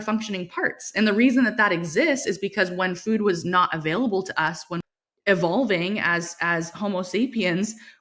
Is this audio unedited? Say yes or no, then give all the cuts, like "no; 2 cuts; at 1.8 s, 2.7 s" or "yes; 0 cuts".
no; 1 cut; at 4.7 s